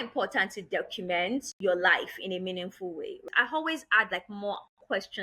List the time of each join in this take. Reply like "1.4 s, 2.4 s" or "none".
1.5 s, 3.2 s

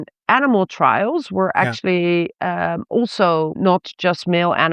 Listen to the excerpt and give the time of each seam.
3.6 s

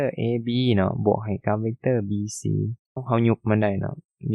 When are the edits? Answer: 3.0 s

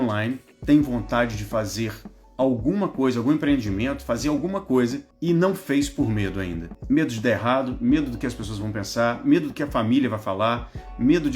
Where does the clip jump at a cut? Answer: 5.1 s, 6.7 s

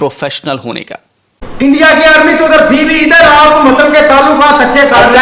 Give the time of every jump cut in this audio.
1.4 s

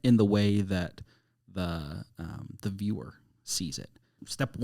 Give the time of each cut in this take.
none

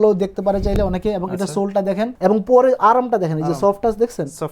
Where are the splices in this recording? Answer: 2.1 s

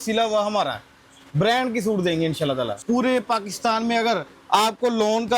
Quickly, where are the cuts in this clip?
2.8 s

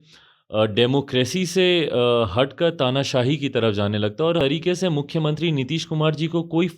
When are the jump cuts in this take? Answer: 4.4 s

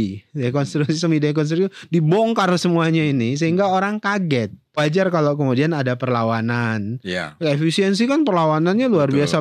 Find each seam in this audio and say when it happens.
4.8 s

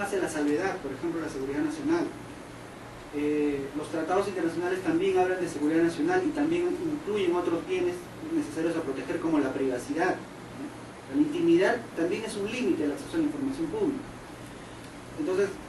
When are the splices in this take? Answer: 9.4 s

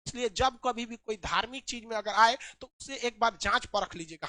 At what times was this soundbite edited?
none

